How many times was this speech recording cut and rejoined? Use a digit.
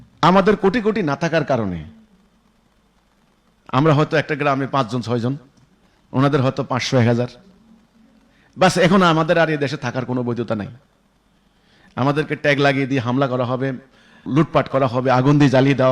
0